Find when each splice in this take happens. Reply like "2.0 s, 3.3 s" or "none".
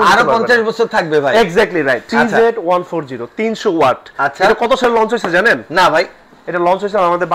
2.1 s